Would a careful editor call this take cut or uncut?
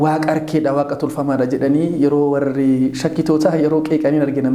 uncut